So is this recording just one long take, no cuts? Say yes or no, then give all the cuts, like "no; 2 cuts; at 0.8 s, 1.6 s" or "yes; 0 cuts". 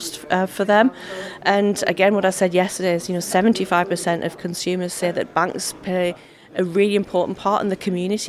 yes; 0 cuts